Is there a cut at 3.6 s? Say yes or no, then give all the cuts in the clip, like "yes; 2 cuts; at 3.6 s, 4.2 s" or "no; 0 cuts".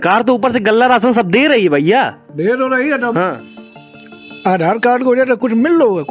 no; 0 cuts